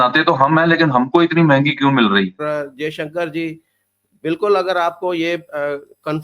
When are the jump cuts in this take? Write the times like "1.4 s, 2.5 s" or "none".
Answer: 2.4 s